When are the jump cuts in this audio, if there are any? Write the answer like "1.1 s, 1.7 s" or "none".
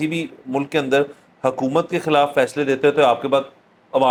none